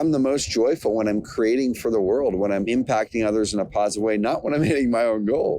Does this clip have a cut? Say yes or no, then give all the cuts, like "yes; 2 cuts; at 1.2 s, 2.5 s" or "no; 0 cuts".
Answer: yes; 1 cut; at 2.7 s